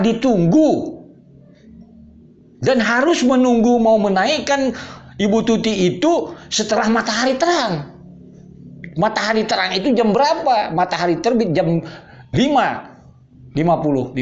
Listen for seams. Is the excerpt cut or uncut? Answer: uncut